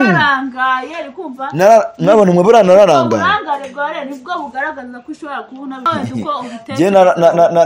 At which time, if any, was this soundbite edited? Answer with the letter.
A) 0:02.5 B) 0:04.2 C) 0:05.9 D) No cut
C